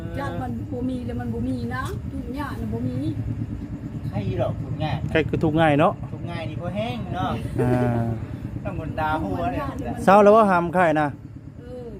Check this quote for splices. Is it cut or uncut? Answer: uncut